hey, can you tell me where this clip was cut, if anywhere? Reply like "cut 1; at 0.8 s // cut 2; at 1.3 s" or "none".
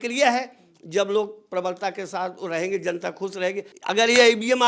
cut 1; at 3.7 s